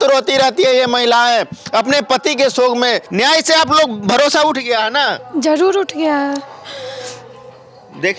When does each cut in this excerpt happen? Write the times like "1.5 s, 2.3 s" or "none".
3.1 s